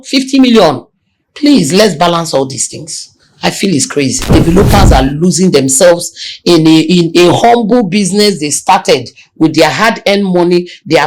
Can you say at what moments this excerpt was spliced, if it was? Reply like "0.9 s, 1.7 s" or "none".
4.3 s